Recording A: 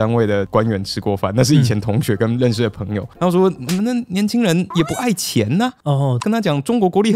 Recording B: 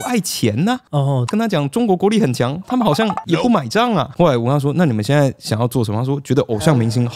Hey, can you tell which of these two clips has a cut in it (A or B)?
A